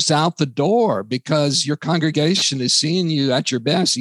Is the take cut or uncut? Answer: uncut